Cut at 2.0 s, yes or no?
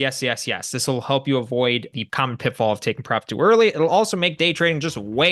yes